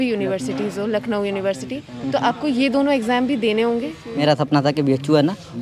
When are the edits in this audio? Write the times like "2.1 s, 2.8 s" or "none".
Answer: 4.2 s